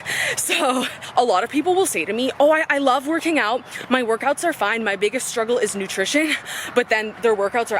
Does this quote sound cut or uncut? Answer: cut